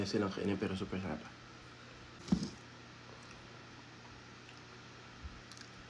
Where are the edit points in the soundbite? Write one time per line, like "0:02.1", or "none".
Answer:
0:02.2